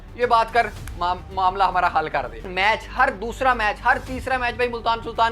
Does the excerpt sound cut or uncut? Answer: cut